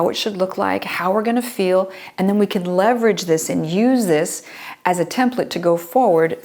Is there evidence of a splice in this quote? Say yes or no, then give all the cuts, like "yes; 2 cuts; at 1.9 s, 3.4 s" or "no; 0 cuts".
no; 0 cuts